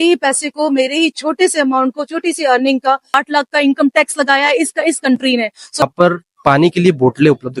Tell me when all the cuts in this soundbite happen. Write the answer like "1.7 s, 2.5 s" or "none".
3.2 s, 5.8 s